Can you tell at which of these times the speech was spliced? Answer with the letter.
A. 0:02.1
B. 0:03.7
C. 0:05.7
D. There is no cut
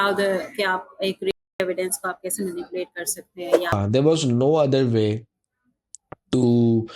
B